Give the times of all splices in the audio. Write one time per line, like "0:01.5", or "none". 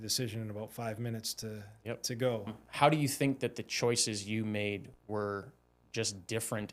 0:02.6